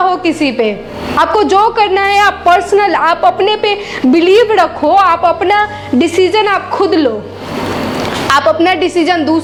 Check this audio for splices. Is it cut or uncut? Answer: uncut